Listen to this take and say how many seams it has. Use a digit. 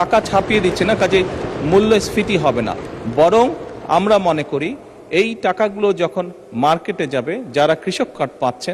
0